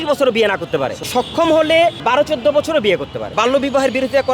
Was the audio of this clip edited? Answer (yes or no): yes